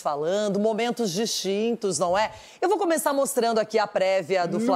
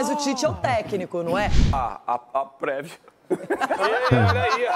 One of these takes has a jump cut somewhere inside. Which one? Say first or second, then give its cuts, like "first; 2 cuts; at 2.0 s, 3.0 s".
second; 1 cut; at 1.7 s